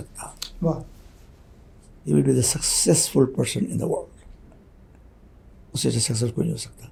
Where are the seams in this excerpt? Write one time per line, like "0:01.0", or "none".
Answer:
none